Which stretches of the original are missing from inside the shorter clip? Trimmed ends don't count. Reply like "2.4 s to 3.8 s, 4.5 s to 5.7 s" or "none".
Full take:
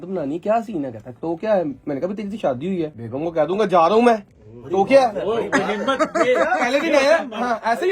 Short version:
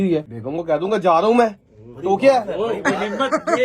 none